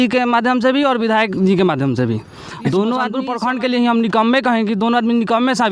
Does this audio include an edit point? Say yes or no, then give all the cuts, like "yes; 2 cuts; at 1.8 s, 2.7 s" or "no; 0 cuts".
yes; 1 cut; at 3.3 s